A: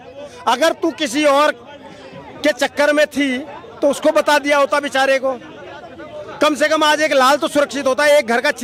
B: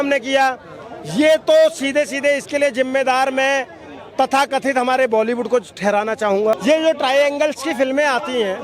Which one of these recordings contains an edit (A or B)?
B